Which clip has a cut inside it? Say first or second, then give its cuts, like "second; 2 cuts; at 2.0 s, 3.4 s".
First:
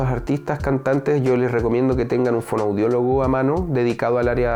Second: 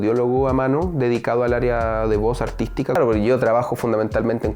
second; 1 cut; at 3.0 s